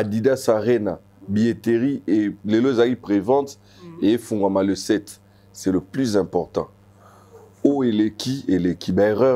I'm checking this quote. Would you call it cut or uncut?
uncut